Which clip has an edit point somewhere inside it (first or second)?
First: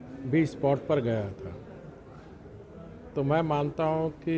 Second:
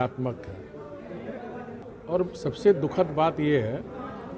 second